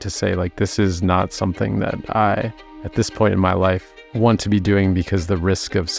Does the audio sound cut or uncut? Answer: uncut